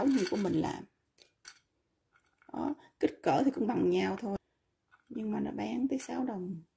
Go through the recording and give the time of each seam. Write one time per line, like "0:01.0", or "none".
none